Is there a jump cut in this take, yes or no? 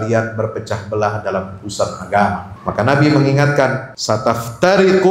yes